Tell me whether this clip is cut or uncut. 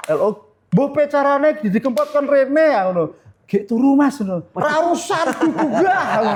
uncut